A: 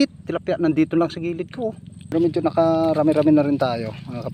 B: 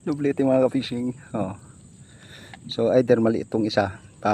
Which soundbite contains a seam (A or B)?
A